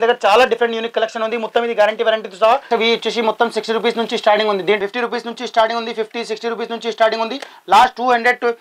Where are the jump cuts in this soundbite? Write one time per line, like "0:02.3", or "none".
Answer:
0:02.7
0:04.8